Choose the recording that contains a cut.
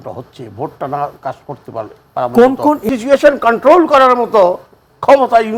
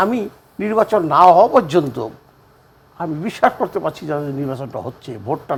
first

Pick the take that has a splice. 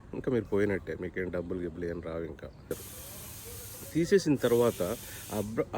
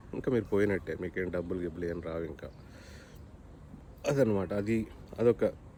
first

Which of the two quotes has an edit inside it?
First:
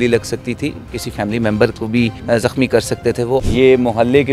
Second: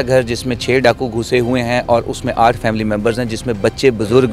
first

